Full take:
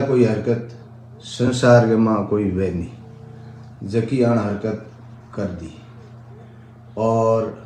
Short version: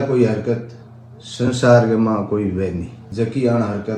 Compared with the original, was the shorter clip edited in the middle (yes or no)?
yes